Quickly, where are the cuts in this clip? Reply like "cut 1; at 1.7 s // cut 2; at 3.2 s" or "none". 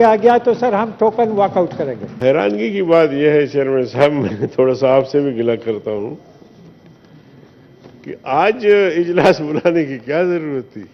cut 1; at 2.2 s